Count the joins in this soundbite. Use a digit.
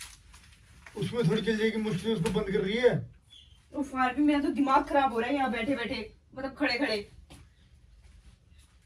0